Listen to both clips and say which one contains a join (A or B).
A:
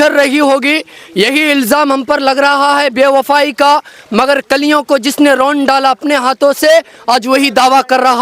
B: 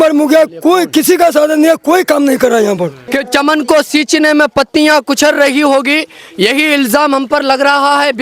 B